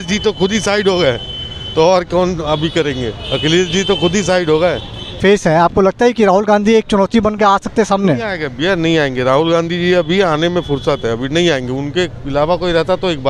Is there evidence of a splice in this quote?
yes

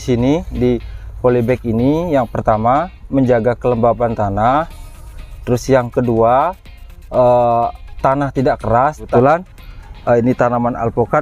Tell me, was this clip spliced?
yes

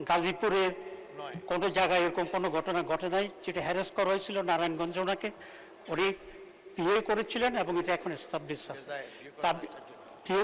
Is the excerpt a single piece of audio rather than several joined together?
yes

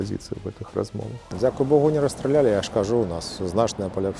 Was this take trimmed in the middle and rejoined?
yes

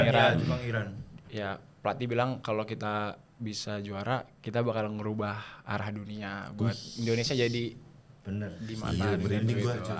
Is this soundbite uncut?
yes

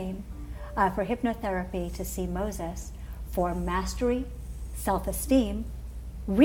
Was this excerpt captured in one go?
no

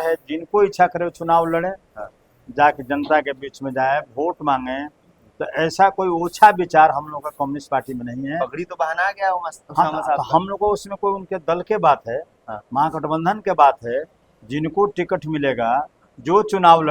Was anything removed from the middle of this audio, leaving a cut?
no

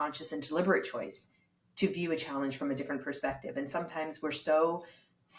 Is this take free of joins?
yes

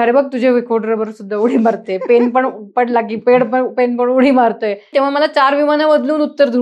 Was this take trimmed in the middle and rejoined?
yes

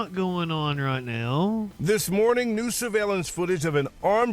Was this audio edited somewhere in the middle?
yes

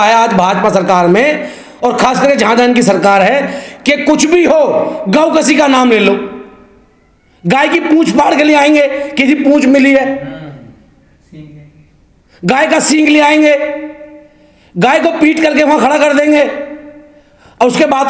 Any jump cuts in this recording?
no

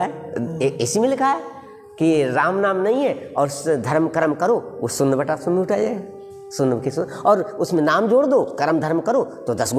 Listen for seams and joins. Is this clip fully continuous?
yes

